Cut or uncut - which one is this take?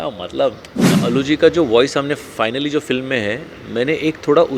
cut